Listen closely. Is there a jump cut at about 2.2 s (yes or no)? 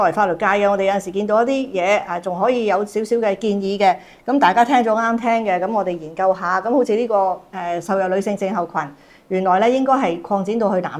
no